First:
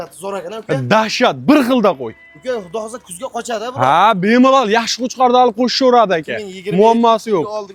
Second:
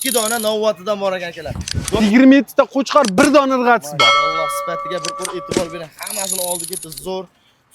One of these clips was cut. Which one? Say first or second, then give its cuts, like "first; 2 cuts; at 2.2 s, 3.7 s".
second; 1 cut; at 2.0 s